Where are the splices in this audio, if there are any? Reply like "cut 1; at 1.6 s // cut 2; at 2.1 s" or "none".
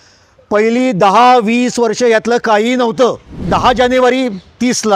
cut 1; at 3.5 s